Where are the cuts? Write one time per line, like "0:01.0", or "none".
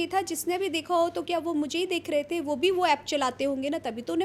none